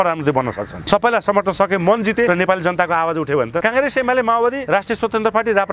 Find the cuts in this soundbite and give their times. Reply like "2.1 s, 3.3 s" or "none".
0.8 s, 2.3 s, 3.6 s, 4.6 s